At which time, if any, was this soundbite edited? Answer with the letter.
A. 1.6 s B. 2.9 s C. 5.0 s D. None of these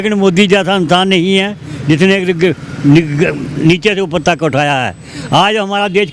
D